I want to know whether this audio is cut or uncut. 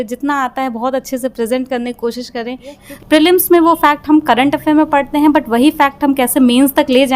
cut